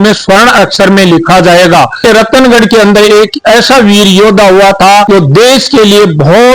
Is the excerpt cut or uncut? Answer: cut